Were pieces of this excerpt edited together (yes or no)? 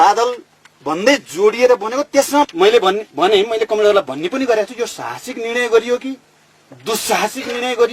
yes